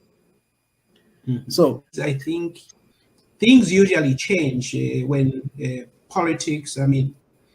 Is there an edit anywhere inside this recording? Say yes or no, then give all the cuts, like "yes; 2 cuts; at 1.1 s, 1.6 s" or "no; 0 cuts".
yes; 1 cut; at 2.0 s